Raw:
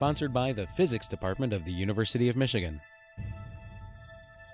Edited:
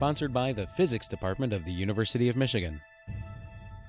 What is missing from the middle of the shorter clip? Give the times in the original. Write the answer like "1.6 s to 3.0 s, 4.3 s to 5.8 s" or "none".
2.9 s to 3.0 s